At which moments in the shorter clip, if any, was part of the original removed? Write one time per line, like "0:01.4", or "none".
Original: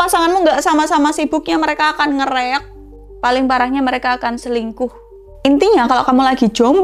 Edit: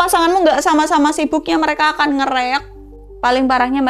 none